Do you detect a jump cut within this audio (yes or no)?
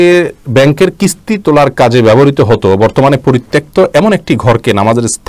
no